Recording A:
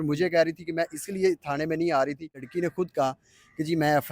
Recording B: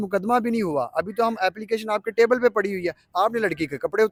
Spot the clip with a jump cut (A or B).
A